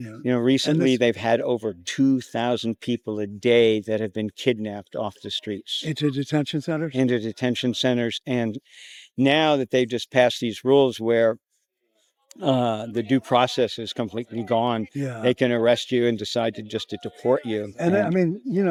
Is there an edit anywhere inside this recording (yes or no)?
no